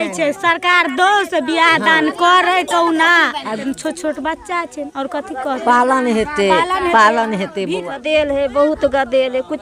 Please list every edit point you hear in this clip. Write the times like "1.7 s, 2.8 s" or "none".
3.6 s, 7.9 s